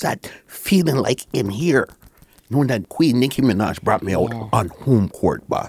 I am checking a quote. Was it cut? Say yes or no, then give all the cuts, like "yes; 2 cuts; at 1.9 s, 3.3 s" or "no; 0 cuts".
yes; 1 cut; at 2.8 s